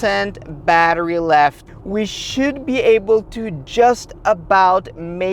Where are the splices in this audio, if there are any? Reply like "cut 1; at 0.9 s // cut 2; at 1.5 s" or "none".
cut 1; at 1.6 s